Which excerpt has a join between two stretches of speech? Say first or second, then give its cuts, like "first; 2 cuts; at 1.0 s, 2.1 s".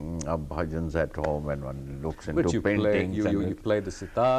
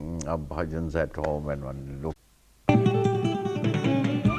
first; 1 cut; at 2.2 s